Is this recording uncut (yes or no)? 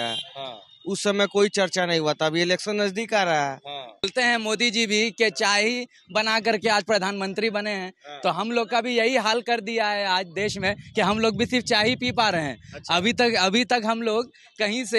no